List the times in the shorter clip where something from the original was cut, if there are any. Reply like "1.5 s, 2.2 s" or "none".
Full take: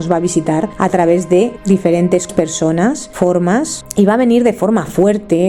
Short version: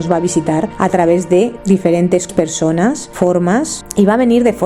none